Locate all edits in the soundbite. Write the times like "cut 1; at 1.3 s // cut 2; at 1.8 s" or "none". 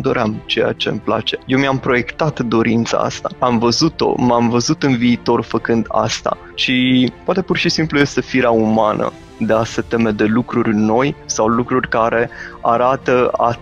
cut 1; at 1.3 s // cut 2; at 3.2 s // cut 3; at 6.5 s // cut 4; at 7.2 s // cut 5; at 11.2 s